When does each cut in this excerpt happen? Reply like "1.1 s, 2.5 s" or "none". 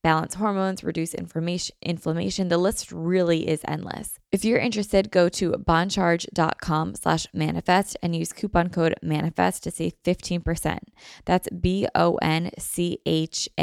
4.1 s